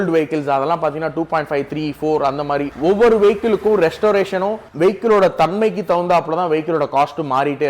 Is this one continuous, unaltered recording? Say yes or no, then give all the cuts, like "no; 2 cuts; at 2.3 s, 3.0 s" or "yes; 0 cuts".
no; 2 cuts; at 2.7 s, 4.6 s